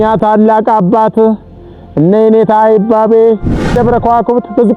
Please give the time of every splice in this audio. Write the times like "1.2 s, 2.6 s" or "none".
3.8 s